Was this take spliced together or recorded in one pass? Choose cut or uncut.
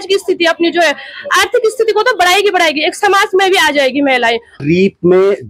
cut